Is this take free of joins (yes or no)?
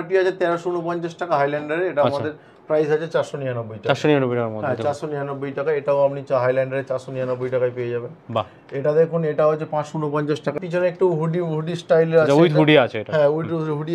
yes